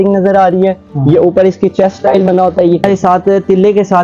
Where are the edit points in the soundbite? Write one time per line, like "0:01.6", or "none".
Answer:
0:02.8